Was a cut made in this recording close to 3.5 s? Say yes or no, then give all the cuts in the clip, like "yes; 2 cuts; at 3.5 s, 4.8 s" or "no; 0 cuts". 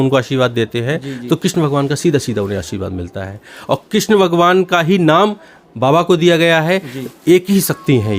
no; 0 cuts